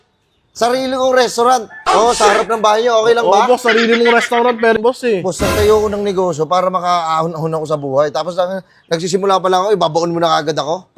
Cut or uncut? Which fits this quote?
cut